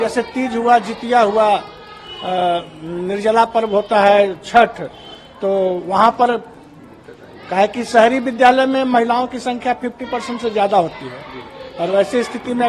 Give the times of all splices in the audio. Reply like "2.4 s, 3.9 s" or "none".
none